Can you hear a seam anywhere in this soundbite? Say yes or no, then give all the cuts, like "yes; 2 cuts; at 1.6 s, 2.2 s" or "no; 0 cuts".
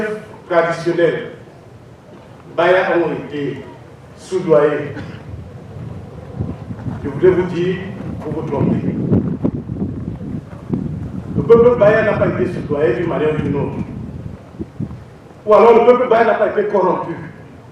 no; 0 cuts